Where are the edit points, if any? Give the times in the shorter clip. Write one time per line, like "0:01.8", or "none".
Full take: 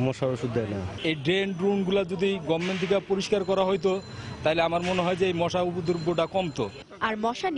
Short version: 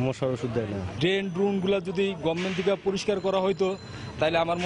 0:00.9